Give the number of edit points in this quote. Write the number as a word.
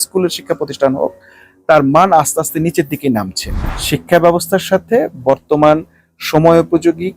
one